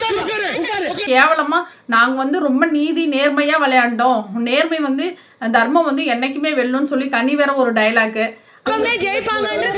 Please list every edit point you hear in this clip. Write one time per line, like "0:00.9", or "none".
none